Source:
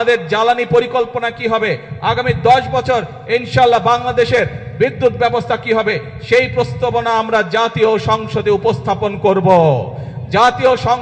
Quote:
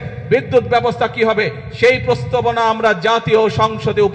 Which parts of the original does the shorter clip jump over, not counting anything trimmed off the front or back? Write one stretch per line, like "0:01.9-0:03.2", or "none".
none